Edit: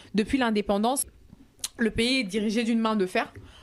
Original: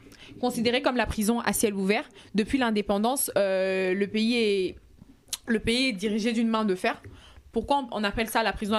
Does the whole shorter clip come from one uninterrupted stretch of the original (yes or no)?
no